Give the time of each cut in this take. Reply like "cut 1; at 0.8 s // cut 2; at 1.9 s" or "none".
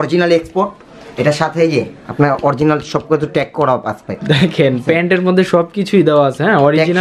none